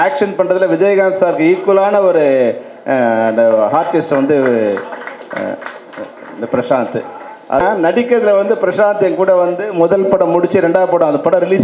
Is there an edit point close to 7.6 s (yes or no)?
yes